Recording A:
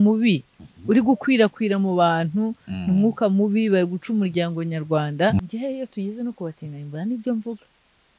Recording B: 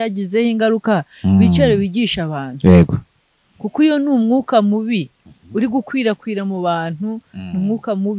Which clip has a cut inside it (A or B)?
A